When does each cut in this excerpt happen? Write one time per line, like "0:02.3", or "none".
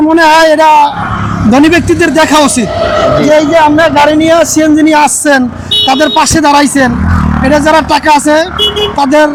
none